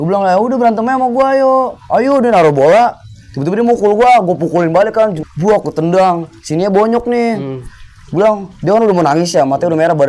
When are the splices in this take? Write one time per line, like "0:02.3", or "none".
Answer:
0:05.2

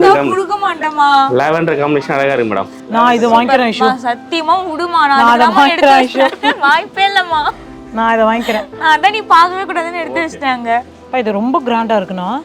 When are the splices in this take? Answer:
0:02.8
0:11.0

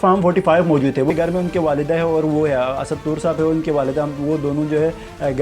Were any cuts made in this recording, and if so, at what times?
0:01.1

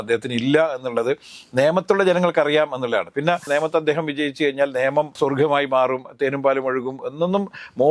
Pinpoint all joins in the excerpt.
0:03.5
0:05.1

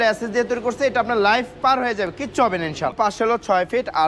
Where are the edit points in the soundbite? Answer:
0:02.9

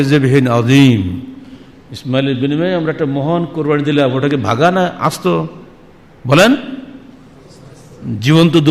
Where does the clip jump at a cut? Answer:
none

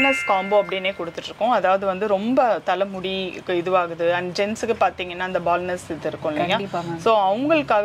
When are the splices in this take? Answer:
none

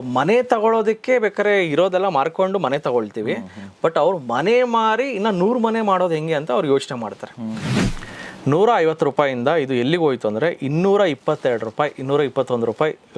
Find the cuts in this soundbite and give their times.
0:07.8

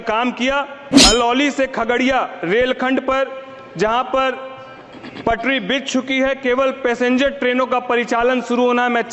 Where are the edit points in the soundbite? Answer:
0:00.9

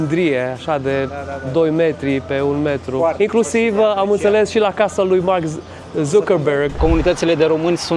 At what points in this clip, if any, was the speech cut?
0:03.2
0:06.7

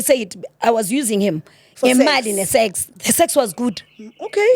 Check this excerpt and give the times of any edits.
0:02.9

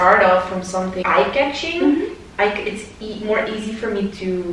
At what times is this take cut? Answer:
0:01.0

